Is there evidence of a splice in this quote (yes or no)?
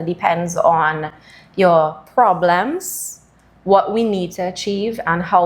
no